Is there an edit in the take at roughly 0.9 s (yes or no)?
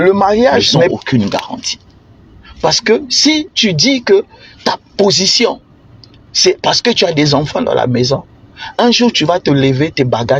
yes